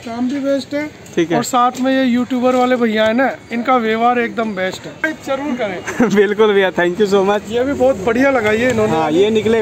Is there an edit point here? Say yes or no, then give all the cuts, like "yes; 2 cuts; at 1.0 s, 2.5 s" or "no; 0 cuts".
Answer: yes; 2 cuts; at 5.0 s, 7.5 s